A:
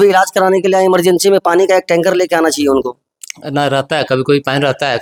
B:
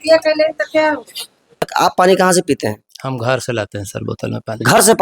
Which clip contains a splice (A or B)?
B